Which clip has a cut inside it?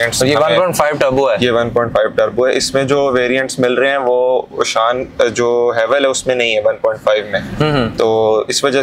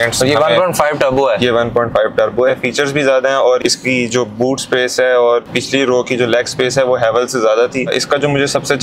second; 4 cuts; at 2.5 s, 3.6 s, 5.4 s, 7.9 s

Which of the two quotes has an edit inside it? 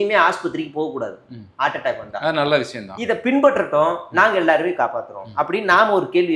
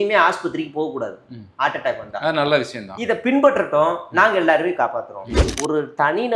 second; 1 cut; at 5.2 s

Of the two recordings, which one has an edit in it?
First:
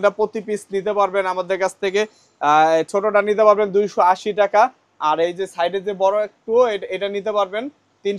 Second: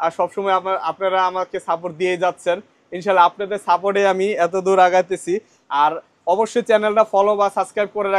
second; 1 cut; at 5.6 s

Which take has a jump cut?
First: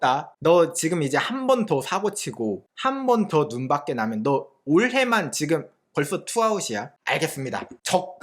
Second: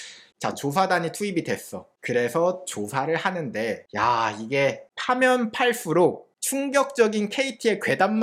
first; 1 cut; at 6.9 s

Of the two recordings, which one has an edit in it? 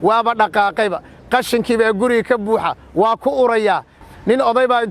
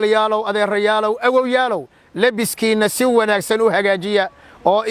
first; 1 cut; at 4.0 s

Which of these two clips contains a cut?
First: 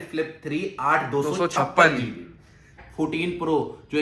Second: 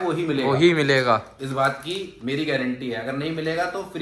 first; 1 cut; at 2.7 s

